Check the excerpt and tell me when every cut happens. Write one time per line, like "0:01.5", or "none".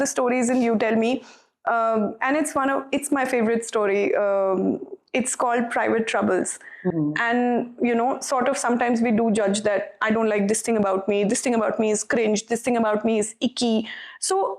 0:06.9